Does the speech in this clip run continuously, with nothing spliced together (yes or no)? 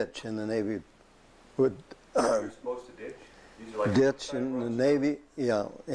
yes